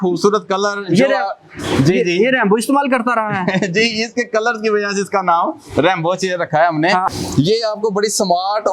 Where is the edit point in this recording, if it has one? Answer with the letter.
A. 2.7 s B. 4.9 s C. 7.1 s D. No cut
C